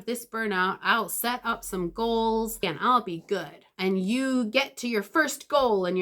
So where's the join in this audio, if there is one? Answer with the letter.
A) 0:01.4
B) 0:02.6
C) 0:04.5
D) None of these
B